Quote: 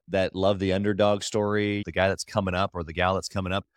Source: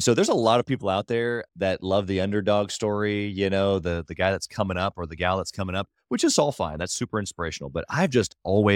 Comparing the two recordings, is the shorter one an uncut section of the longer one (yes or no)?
no